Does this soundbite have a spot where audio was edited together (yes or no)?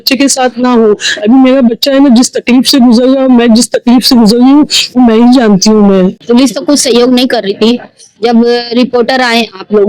yes